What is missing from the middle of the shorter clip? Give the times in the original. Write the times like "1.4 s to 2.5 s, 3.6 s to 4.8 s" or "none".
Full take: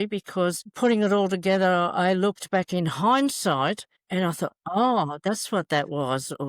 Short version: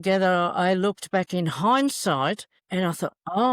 none